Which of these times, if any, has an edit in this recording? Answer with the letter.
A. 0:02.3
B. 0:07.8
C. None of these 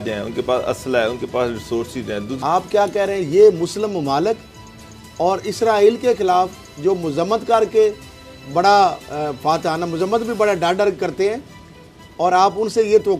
A